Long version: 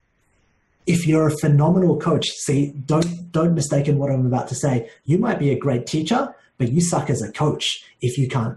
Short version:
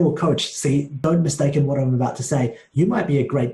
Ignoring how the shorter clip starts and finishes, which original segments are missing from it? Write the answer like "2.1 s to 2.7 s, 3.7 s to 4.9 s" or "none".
2.8 s to 3.2 s